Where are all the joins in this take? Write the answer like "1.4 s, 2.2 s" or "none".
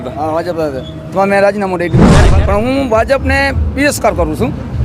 2.2 s